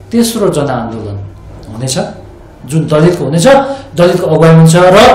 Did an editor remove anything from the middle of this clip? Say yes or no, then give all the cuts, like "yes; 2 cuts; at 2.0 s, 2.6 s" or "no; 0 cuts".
no; 0 cuts